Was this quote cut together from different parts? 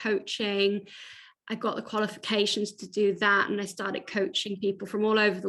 no; 0 cuts

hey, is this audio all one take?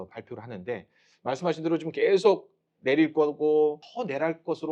no; 1 cut; at 1.1 s

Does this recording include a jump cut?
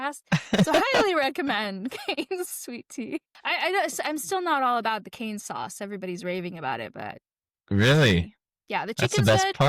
yes; 1 cut; at 3.3 s

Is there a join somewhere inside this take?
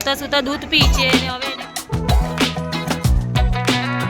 yes; 1 cut; at 0.9 s

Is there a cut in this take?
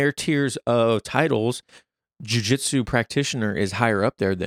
no; 0 cuts

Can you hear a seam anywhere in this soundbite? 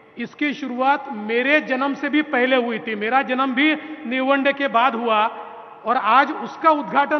no; 0 cuts

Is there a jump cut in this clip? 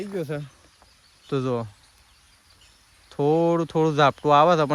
no; 0 cuts

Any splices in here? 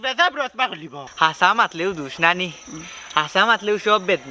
yes; 1 cut; at 1.0 s

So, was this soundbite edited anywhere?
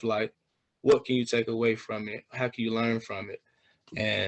no; 0 cuts

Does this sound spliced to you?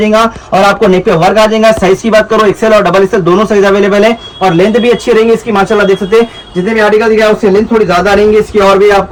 no; 0 cuts

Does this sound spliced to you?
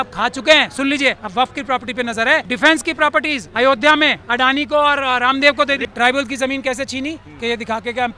yes; 5 cuts; at 1.2 s, 2.5 s, 3.4 s, 4.2 s, 5.8 s

